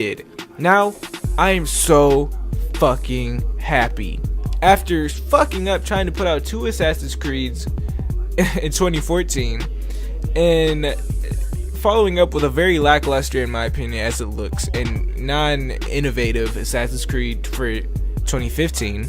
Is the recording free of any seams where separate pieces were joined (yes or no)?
yes